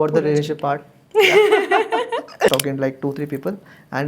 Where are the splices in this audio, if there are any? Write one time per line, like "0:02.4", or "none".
0:02.5